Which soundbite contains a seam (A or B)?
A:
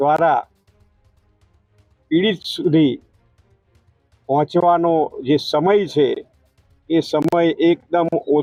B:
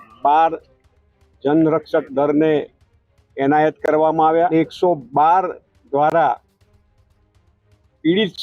B